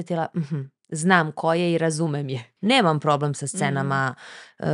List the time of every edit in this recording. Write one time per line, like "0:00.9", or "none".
0:02.5